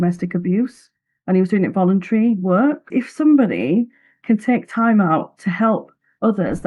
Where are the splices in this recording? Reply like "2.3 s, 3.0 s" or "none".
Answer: 2.9 s